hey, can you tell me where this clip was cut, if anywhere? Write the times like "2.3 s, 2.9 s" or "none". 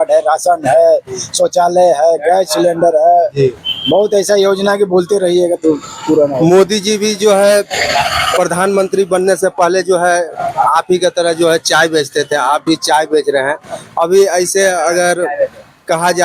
none